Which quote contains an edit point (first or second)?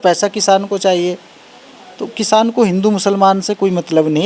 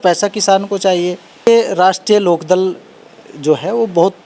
second